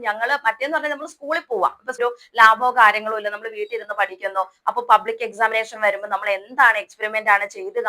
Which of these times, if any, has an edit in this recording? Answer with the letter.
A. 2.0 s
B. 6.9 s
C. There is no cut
A